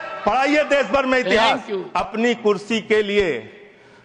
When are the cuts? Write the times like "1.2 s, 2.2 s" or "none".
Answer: 1.8 s